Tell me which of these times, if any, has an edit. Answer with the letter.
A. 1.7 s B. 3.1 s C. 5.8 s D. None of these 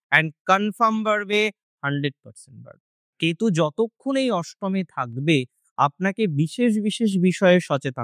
B